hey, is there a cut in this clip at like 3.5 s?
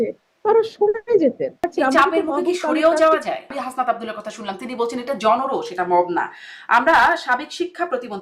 yes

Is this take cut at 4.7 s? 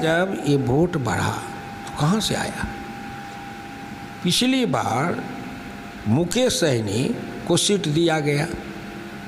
no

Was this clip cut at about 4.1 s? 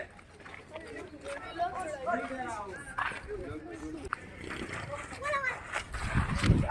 yes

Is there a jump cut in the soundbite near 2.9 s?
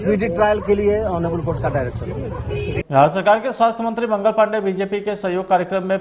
yes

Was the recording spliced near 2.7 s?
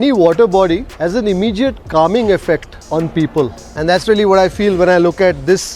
yes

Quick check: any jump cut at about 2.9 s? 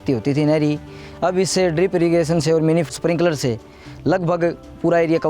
yes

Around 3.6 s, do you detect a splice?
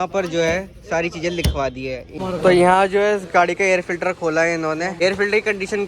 no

